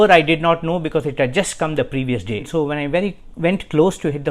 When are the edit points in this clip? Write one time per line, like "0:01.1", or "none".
0:02.5